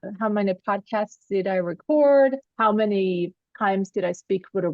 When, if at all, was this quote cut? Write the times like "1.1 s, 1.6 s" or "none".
3.4 s